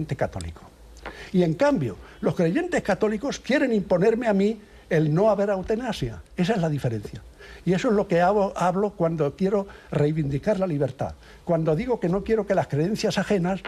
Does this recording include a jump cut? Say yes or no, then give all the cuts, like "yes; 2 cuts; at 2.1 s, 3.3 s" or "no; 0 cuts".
no; 0 cuts